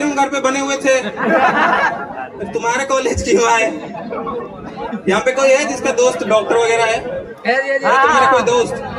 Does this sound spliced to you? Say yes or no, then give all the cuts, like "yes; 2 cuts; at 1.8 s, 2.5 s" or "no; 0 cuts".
no; 0 cuts